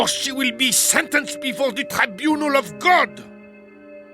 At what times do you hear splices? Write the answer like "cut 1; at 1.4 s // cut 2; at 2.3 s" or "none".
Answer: cut 1; at 3.1 s